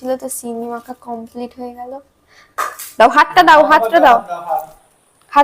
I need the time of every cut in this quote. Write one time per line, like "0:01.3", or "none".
0:02.8